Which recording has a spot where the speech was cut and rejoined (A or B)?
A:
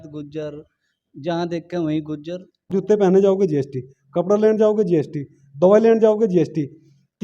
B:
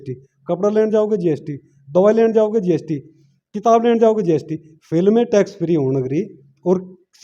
A